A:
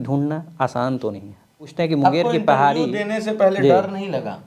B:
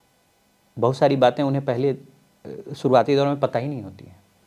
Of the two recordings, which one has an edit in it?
A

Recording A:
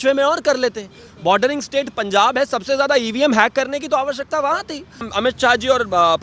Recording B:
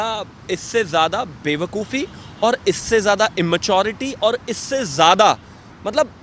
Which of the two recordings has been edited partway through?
A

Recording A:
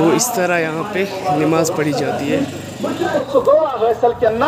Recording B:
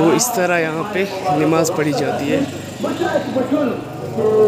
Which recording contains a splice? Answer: A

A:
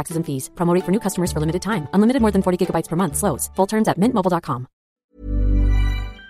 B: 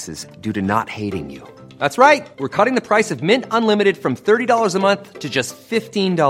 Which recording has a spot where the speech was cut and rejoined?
A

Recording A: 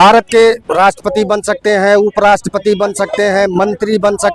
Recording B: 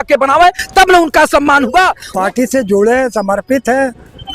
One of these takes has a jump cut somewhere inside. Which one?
B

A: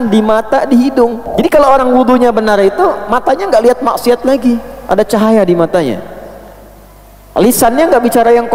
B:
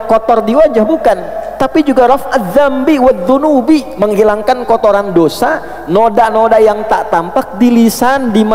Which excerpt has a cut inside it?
A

